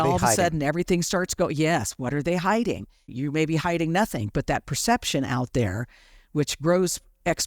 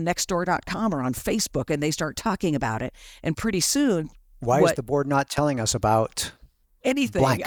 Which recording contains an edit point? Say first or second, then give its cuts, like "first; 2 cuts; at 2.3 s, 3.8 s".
first; 1 cut; at 3.1 s